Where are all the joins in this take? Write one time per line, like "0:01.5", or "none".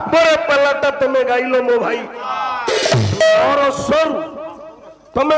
0:02.2